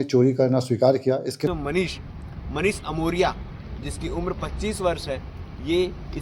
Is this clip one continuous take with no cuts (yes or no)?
no